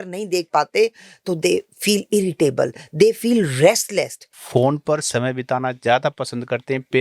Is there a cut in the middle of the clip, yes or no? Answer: yes